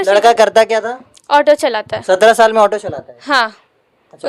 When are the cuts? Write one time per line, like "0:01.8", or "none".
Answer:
none